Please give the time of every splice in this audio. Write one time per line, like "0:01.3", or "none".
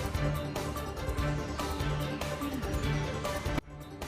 none